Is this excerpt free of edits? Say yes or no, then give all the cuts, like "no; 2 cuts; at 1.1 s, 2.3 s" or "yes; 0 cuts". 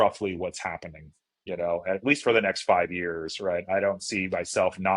yes; 0 cuts